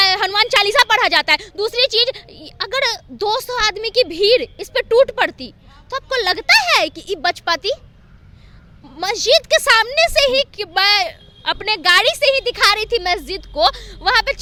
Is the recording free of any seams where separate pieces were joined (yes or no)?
yes